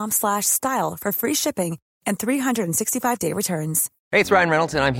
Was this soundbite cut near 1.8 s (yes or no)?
no